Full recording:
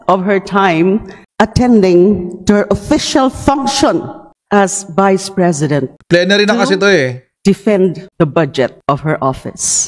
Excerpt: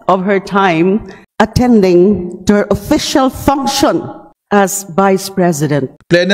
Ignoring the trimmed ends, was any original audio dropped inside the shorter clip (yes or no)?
no